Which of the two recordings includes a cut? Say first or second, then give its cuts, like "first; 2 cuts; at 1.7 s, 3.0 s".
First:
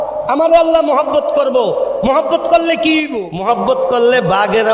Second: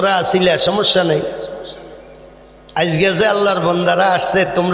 first; 1 cut; at 3.2 s